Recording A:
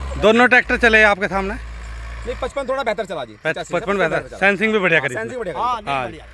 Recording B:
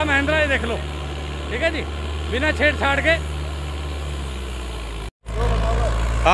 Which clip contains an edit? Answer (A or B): B